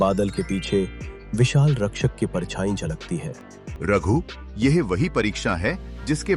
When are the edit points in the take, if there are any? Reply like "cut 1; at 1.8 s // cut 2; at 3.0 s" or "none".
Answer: cut 1; at 3.6 s